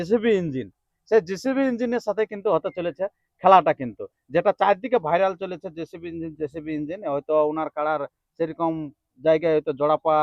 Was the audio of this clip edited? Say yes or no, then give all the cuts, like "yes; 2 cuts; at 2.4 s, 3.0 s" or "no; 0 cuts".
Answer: no; 0 cuts